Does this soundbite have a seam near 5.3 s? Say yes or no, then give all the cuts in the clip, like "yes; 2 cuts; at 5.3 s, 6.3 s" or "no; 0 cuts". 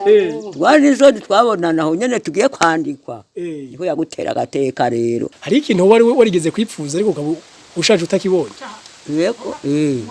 yes; 1 cut; at 5.3 s